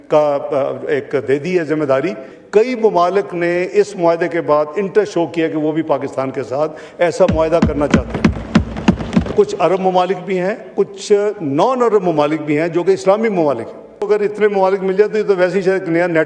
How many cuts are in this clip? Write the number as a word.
three